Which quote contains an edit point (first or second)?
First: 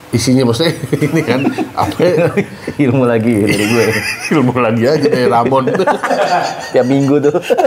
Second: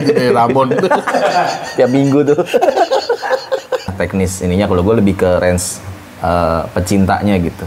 second